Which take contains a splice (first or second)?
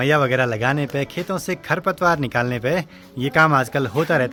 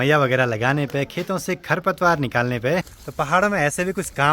second